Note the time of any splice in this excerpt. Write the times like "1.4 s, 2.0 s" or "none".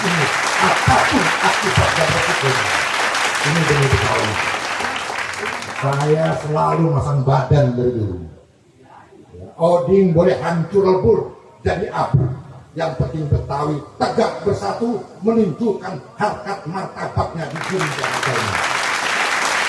18.4 s

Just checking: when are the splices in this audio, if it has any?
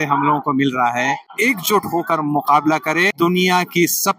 1.3 s, 3.1 s

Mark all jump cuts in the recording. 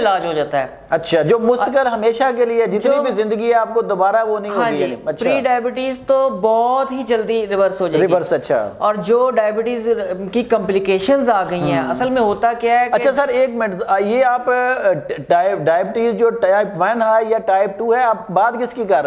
none

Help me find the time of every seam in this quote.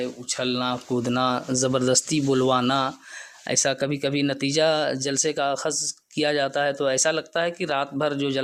none

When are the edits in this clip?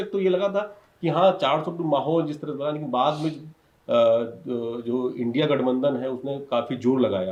none

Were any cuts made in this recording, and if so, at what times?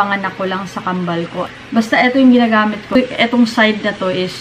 1.5 s

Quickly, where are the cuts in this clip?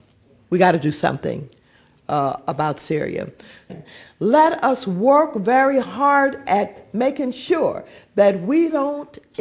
3.7 s

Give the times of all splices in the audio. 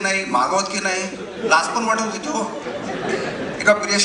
none

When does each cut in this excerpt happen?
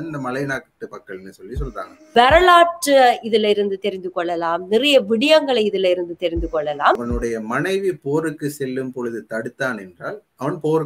2.1 s, 7.0 s

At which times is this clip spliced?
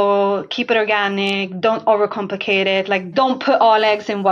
3.1 s

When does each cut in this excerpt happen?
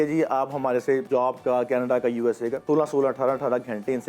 1.0 s, 2.6 s

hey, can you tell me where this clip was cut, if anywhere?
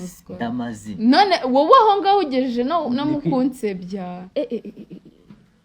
4.2 s

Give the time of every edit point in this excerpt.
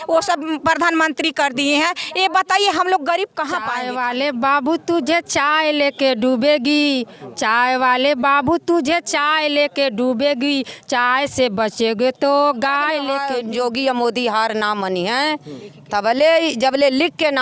3.7 s, 13.2 s

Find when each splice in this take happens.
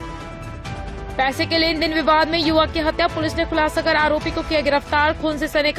1.1 s

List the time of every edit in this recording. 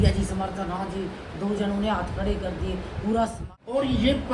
3.4 s

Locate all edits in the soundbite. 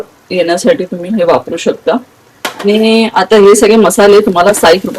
none

